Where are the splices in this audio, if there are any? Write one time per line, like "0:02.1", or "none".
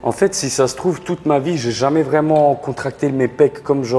none